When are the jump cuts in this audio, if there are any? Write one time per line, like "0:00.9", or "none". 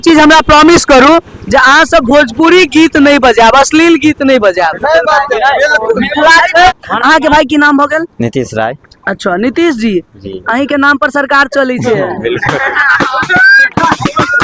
0:06.7